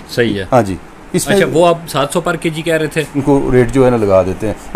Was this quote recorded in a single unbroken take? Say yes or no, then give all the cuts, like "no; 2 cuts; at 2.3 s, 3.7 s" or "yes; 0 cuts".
no; 1 cut; at 3.1 s